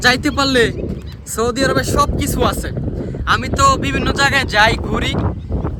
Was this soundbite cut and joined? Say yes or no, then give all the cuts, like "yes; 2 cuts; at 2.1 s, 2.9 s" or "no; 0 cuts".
no; 0 cuts